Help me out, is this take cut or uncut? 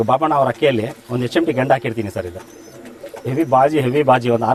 uncut